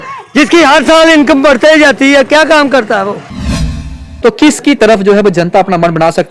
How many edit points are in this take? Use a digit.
1